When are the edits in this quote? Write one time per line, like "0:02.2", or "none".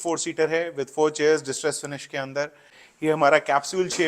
0:02.8